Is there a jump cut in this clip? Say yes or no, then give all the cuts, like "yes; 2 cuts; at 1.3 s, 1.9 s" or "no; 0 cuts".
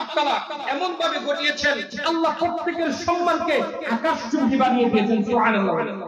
no; 0 cuts